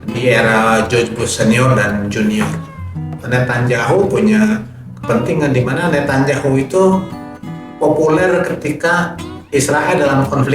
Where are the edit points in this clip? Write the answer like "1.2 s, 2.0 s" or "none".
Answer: 3.2 s